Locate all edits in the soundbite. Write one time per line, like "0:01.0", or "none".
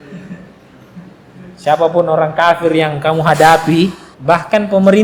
0:04.1